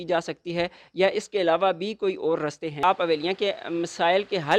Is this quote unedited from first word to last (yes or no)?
no